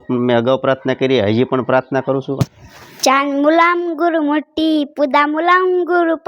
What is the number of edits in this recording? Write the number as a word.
one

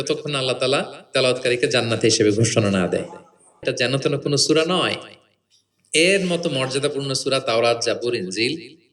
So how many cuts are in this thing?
one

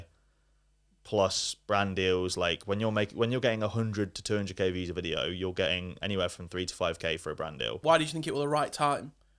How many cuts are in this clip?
one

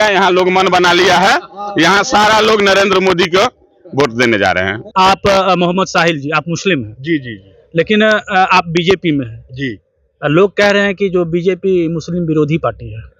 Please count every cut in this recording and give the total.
one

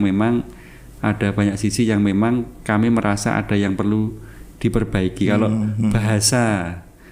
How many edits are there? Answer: zero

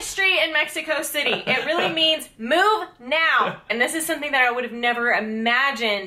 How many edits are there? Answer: one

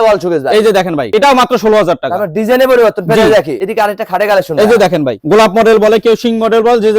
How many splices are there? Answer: two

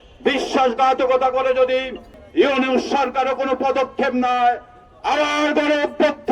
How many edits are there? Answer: one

